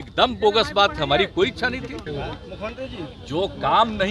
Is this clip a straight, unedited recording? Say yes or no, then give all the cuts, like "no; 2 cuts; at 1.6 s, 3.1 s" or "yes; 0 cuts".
no; 1 cut; at 2.1 s